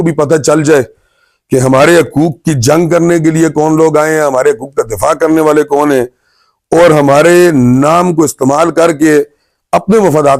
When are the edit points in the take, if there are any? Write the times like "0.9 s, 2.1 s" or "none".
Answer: none